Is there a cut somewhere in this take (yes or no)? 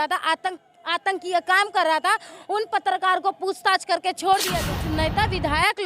yes